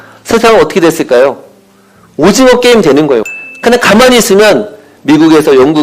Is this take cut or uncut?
cut